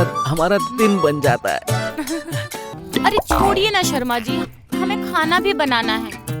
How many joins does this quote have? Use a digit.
1